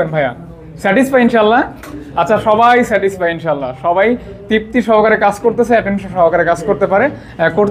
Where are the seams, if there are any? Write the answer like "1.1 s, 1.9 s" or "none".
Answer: none